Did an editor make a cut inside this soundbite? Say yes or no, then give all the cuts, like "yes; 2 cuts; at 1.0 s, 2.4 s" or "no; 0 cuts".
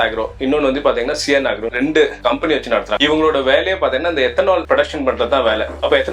yes; 2 cuts; at 1.7 s, 2.9 s